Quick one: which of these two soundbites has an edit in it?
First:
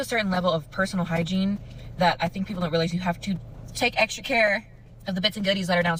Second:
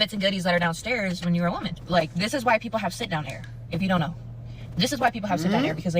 second; 1 cut; at 1.8 s

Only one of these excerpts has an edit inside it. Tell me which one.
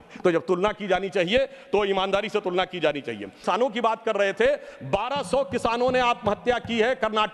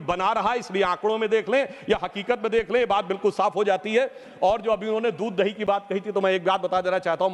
first; 1 cut; at 3.4 s

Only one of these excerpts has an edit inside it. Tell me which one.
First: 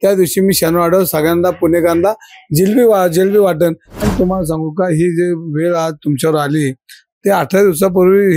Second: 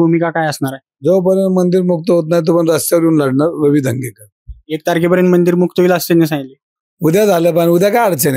first; 1 cut; at 3.9 s

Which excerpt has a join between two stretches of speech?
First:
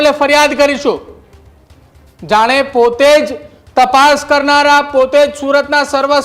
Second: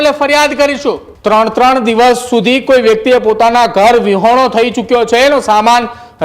second; 1 cut; at 1.1 s

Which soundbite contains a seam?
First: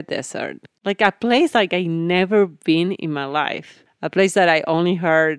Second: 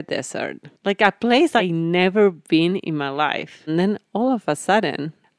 second; 2 cuts; at 1.6 s, 3.7 s

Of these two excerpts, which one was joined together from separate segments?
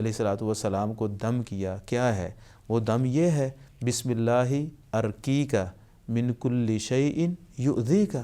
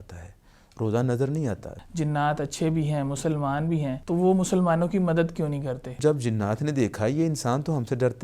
second; 3 cuts; at 1.7 s, 4.0 s, 5.9 s

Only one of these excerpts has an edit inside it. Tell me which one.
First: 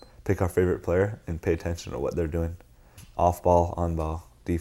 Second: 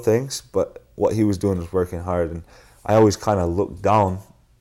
first; 1 cut; at 3.0 s

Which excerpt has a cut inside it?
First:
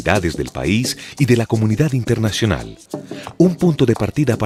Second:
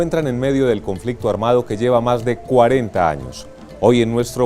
second; 1 cut; at 1.7 s

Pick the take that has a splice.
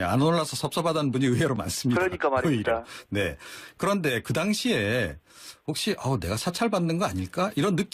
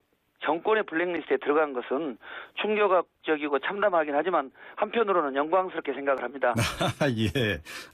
first; 1 cut; at 2.6 s

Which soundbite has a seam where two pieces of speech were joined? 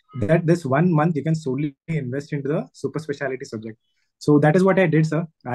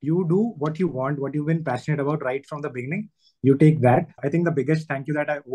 second; 1 cut; at 4.2 s

